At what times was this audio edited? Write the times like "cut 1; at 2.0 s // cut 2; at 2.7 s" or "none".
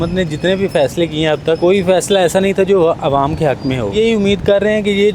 cut 1; at 1.6 s // cut 2; at 3.9 s